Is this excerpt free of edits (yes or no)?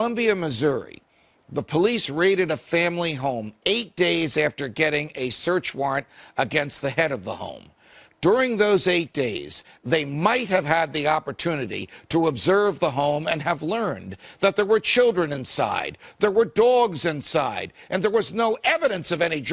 yes